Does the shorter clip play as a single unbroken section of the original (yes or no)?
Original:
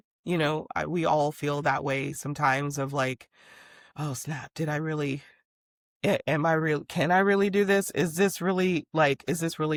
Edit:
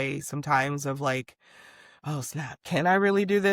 no